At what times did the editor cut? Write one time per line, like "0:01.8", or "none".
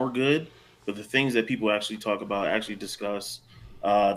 none

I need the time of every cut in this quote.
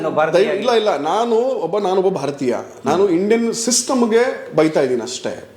none

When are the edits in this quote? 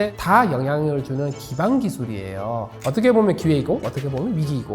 0:02.7

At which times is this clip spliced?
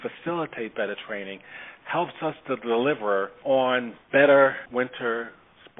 0:03.3
0:04.0
0:04.6

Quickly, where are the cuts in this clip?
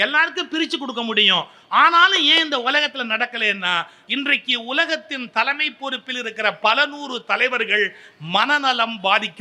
0:04.0

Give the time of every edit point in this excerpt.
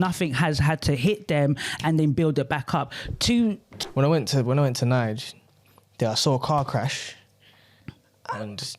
0:03.7

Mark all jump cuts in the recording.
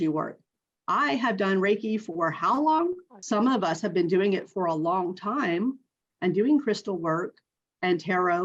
0:03.1

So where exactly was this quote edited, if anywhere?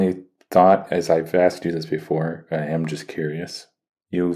none

